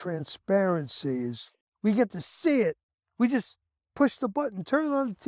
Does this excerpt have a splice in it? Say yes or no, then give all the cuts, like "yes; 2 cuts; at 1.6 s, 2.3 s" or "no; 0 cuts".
yes; 1 cut; at 1.5 s